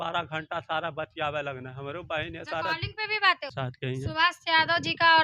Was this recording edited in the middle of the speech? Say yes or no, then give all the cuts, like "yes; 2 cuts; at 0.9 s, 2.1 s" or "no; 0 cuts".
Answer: yes; 1 cut; at 3.5 s